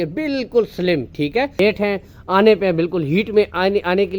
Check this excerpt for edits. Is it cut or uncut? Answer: cut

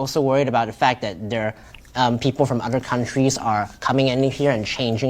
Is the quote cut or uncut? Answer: uncut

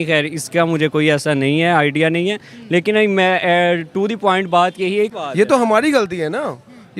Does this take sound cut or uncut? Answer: cut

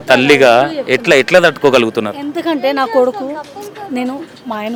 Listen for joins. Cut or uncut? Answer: uncut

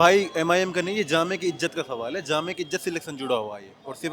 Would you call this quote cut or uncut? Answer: uncut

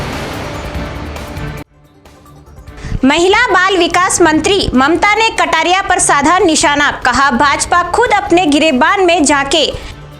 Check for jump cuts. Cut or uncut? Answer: cut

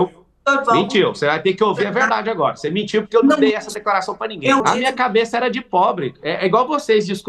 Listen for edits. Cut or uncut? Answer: cut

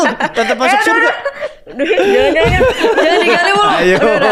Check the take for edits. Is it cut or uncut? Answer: uncut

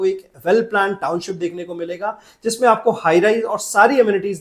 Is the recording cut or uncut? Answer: uncut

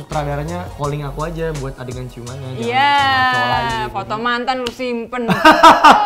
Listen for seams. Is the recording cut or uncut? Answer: uncut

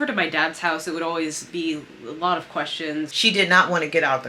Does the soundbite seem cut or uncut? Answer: cut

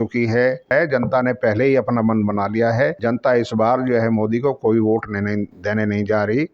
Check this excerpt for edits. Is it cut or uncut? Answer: cut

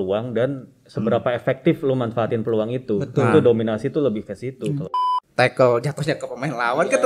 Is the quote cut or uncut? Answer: cut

